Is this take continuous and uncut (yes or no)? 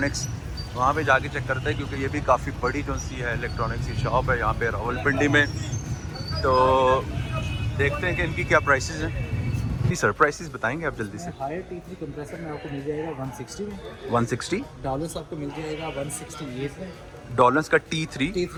yes